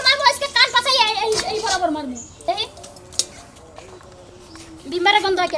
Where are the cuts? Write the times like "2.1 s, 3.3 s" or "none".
2.4 s